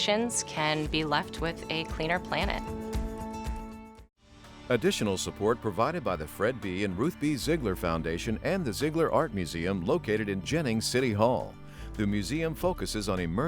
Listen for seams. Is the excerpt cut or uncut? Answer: cut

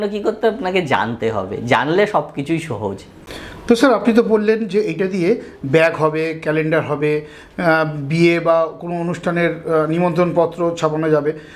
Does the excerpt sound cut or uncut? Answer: uncut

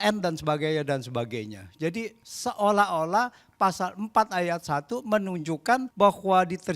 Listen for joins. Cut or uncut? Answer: cut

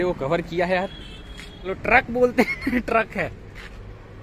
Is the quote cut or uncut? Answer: cut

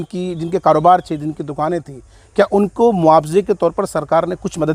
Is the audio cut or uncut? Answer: uncut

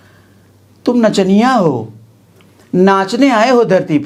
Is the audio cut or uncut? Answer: uncut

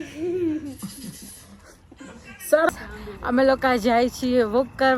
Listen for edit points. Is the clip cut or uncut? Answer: cut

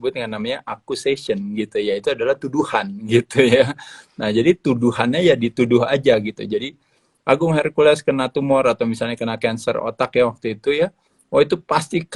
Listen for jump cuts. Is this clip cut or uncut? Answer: uncut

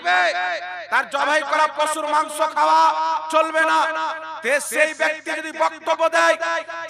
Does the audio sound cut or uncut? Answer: uncut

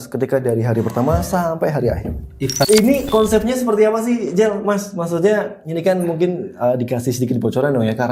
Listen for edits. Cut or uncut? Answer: cut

